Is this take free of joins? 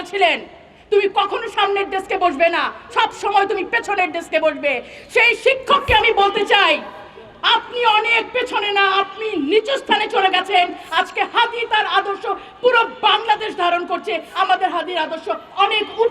yes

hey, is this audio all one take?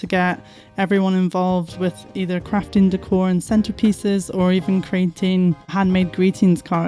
no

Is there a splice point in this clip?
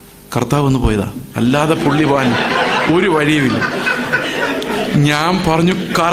no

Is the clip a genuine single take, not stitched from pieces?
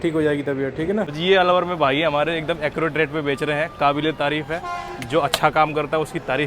no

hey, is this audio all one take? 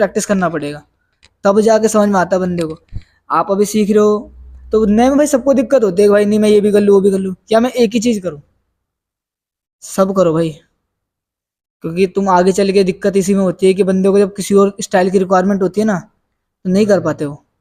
yes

